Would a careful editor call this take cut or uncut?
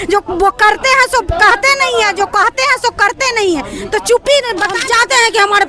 cut